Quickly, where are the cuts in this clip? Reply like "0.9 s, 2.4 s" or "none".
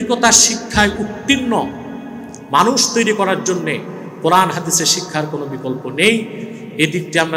none